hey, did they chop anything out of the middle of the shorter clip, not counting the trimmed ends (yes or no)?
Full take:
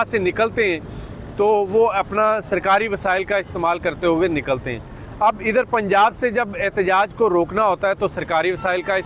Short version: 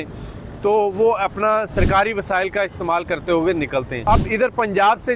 yes